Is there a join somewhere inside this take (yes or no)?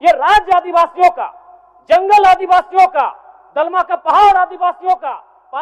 no